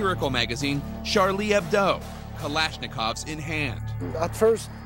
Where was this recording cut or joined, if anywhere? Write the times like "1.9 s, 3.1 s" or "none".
3.1 s